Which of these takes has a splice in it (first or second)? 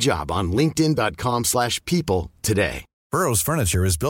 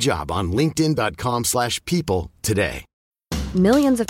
first